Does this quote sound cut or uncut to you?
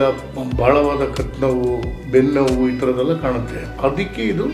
uncut